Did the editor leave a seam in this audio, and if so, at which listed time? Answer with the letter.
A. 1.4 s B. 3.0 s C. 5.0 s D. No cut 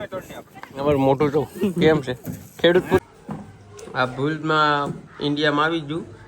B